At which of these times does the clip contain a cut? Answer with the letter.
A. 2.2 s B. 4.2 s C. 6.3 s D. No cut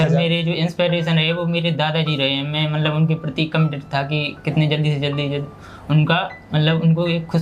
D